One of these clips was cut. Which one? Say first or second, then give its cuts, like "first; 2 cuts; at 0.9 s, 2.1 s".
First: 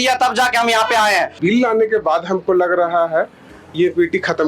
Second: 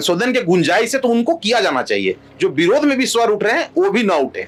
first; 1 cut; at 1.4 s